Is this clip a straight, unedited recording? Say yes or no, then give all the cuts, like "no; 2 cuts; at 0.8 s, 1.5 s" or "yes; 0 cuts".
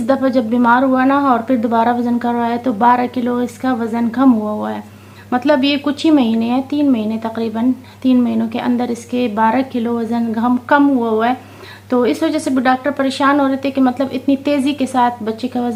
yes; 0 cuts